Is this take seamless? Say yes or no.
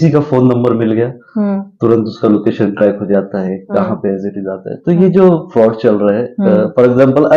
yes